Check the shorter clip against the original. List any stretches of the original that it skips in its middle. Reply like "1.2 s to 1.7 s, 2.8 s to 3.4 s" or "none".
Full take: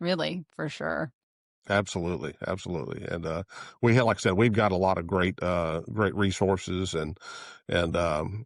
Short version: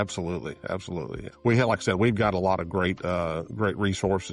3.0 s to 3.6 s

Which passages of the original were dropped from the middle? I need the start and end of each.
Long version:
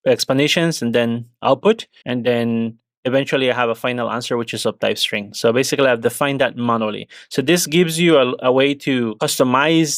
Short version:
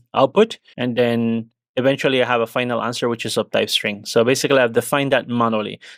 none

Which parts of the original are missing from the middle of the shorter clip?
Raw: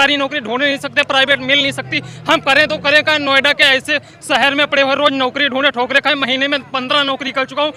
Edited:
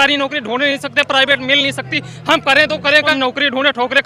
3.1 s to 5.1 s

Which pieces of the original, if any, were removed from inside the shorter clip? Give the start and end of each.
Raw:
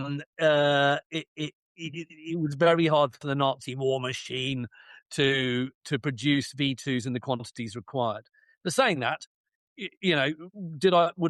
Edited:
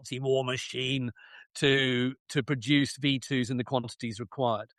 none

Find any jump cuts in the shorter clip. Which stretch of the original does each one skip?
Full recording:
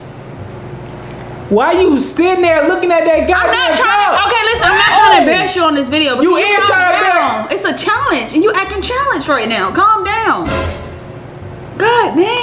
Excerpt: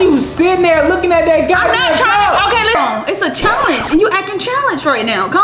4.6 s to 7.2 s

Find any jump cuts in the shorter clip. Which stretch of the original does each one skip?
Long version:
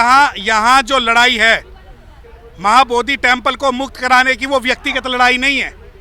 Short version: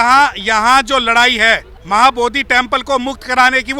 1.7 s to 2.5 s

